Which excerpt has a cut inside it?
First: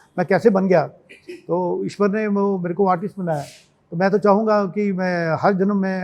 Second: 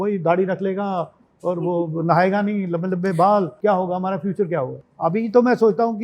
second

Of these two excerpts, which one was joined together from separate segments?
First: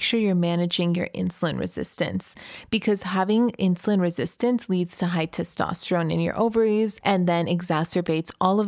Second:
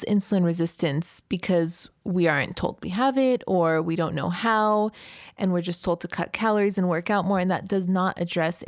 first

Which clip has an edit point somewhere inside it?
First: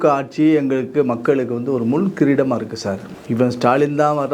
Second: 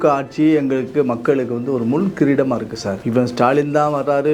second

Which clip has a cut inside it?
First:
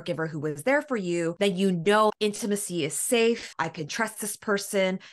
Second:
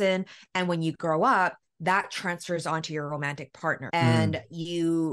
first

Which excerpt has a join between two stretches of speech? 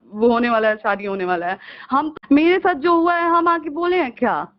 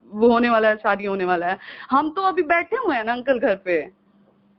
first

